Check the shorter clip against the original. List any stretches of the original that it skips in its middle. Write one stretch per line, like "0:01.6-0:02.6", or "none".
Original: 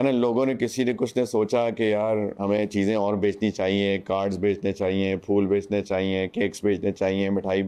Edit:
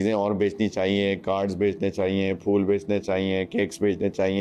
none